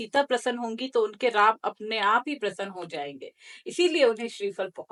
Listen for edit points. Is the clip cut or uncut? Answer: uncut